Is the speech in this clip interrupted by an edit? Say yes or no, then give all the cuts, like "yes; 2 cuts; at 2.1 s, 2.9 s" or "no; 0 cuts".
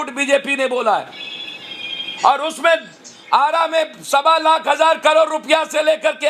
no; 0 cuts